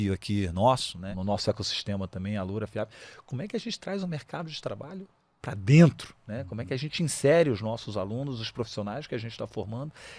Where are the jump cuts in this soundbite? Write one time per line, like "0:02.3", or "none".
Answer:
0:01.1